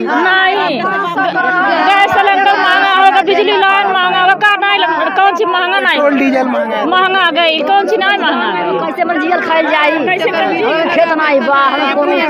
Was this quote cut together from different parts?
no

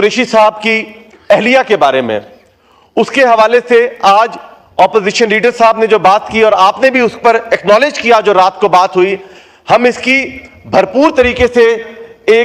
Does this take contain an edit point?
no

